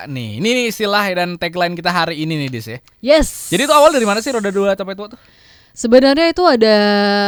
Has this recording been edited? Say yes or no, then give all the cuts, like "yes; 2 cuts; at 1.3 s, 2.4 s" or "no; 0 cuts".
no; 0 cuts